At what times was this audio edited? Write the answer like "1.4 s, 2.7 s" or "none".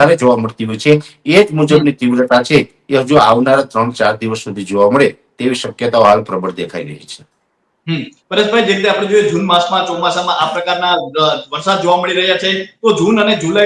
none